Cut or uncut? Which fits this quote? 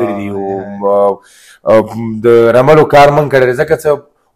uncut